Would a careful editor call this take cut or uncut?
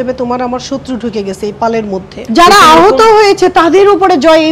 cut